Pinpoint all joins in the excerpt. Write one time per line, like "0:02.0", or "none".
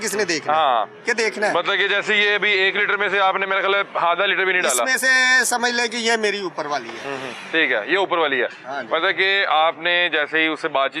none